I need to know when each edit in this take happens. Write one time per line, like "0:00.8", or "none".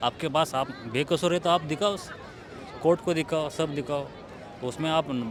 none